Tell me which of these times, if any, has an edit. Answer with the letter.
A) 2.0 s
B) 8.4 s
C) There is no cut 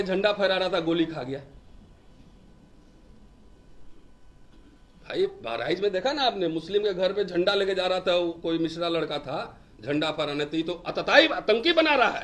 C